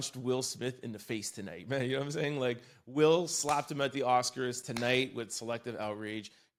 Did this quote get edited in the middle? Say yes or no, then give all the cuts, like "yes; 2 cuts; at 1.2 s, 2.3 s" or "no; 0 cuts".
no; 0 cuts